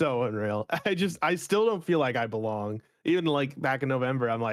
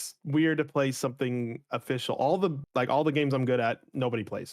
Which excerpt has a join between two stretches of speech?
second; 1 cut; at 2.6 s

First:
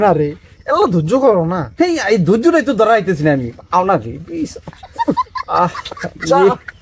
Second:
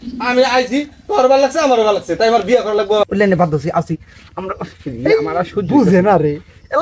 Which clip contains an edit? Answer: second; 1 cut; at 3.0 s

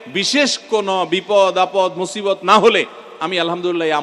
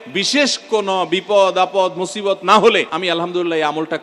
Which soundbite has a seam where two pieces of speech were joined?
second; 1 cut; at 2.9 s

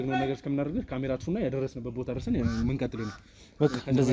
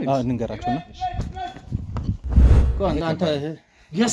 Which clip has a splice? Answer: second; 1 cut; at 2.6 s

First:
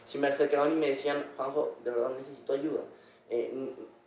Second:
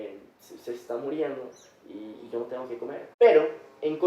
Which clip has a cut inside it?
second; 1 cut; at 3.0 s

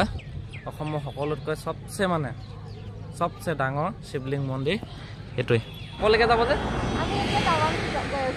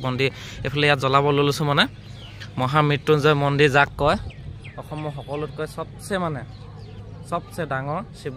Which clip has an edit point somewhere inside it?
first; 1 cut; at 5.9 s

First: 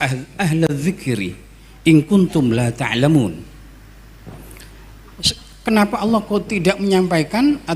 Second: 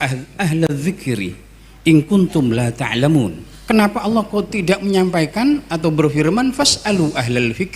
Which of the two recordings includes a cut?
second; 1 cut; at 3.5 s

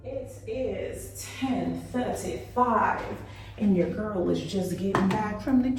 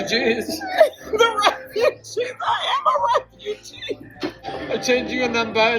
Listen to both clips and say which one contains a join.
second; 1 cut; at 4.5 s

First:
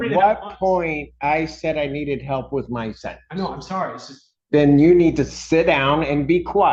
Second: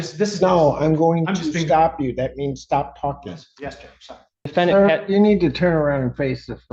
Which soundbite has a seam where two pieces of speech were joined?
second; 1 cut; at 4.5 s

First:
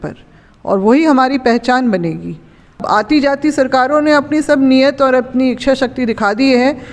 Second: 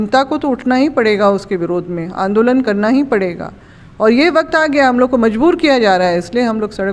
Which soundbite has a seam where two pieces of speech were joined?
first; 1 cut; at 2.8 s

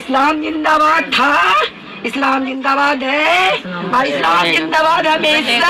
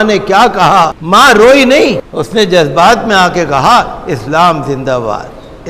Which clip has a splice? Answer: second; 2 cuts; at 1.0 s, 2.1 s

